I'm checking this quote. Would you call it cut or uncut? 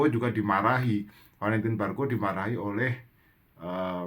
uncut